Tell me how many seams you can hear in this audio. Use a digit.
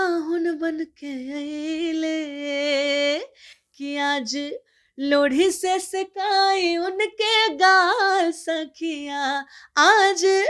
0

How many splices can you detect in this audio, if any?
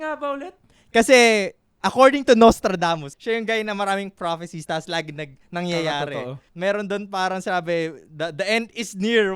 2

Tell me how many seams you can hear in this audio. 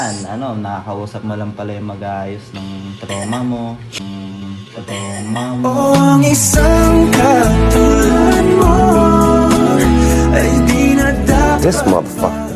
0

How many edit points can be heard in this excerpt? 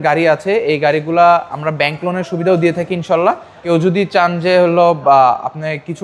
1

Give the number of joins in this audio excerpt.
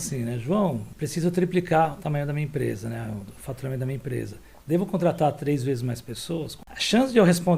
2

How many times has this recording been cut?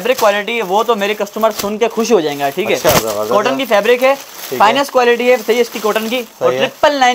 0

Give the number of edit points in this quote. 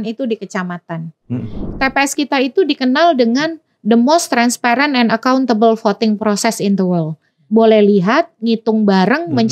2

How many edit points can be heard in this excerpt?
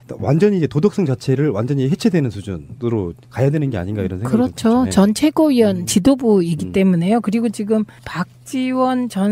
1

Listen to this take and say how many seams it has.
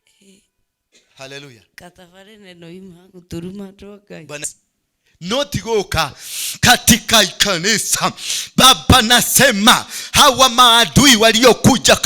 1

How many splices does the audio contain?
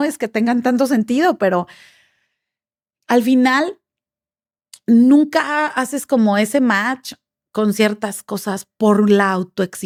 0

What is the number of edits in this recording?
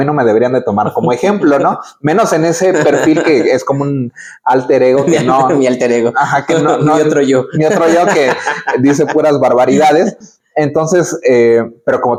0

